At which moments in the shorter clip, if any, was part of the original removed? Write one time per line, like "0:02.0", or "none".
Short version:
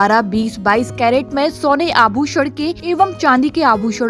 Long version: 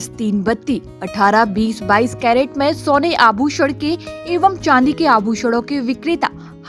0:02.8

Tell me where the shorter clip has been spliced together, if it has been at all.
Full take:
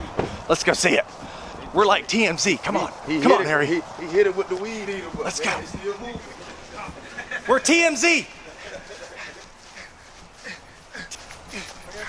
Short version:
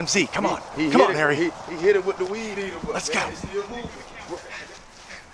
0:04.2

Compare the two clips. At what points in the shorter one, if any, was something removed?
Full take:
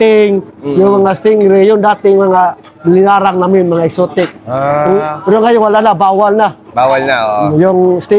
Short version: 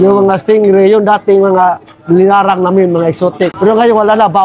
0:03.5

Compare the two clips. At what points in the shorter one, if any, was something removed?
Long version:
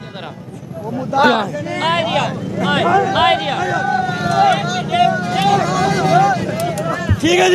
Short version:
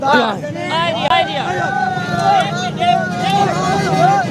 0:01.1

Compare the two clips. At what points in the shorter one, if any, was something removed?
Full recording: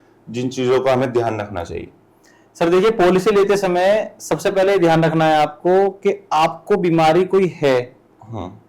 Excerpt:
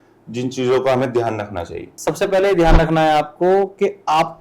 0:02.0

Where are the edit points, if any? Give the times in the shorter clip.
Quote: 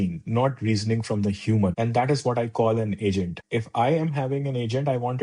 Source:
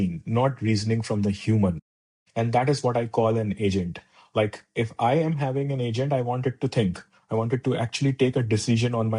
0:01.7
0:03.4

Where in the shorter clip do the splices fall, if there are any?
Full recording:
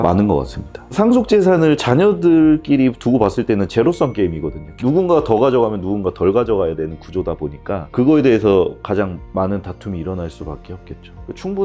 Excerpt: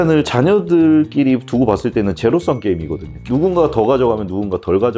none

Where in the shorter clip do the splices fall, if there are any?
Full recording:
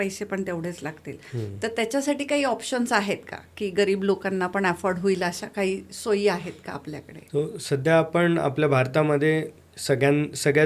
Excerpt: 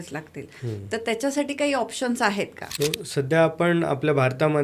0:02.6

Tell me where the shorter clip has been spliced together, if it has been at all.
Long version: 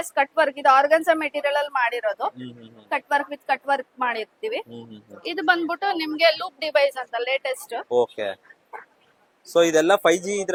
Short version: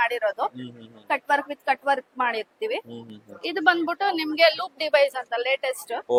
none

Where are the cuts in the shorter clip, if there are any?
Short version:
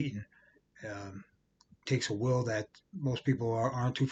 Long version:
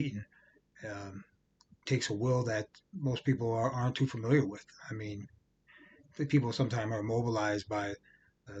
none

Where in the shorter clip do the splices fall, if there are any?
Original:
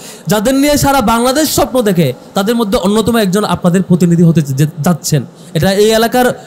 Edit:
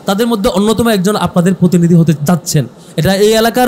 0:02.2

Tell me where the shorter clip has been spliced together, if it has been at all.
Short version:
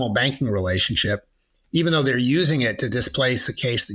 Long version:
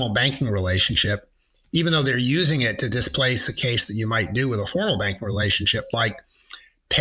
none

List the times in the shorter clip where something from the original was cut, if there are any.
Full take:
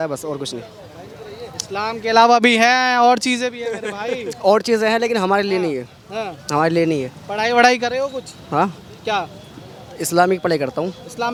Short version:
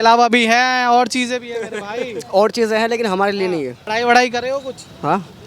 0:03.8

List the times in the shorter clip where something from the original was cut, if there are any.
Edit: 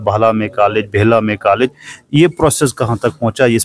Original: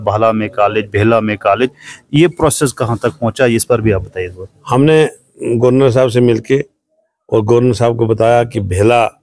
none

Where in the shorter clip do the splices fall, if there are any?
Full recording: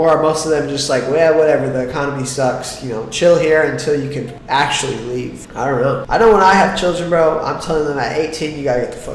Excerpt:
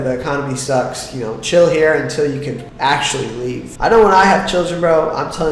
0:03.7

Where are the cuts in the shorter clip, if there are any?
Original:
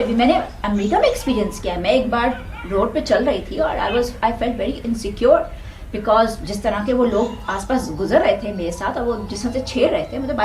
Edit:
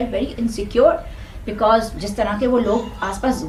none

